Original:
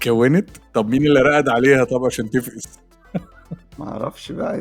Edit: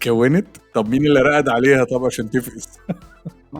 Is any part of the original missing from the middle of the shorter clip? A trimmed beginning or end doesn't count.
yes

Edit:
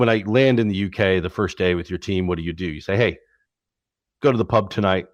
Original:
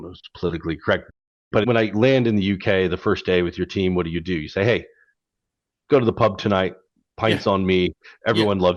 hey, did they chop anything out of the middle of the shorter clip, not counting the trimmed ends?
no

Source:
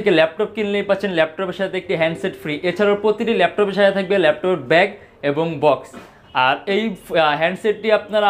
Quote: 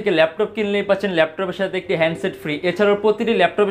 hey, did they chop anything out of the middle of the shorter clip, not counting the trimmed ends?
no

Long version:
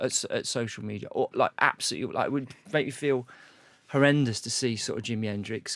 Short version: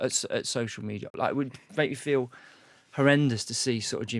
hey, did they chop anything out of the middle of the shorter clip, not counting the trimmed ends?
yes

